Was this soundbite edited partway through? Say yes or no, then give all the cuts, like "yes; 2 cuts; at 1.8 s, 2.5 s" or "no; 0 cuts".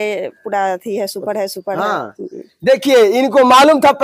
no; 0 cuts